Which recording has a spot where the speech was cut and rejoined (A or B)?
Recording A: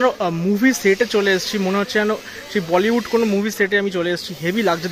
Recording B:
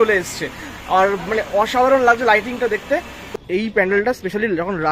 B